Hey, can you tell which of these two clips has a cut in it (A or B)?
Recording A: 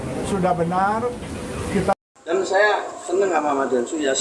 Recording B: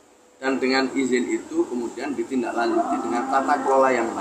A